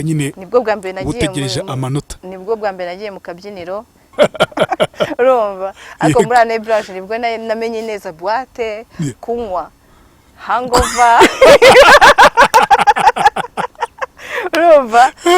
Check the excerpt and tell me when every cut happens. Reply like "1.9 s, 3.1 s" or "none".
4.0 s